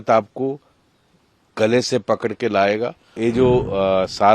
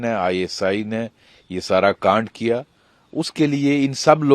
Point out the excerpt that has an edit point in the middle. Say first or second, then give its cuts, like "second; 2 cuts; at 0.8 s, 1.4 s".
first; 1 cut; at 3.1 s